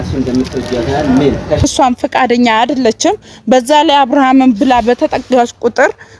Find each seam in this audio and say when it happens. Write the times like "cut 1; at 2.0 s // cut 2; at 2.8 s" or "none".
cut 1; at 1.6 s